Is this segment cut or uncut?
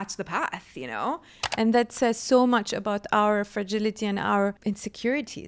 cut